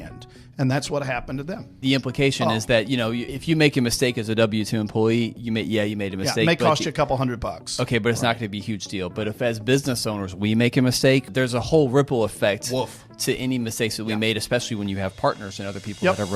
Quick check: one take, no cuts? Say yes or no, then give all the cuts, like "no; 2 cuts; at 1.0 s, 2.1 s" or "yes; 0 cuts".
no; 4 cuts; at 1.7 s, 3.3 s, 5.4 s, 11.3 s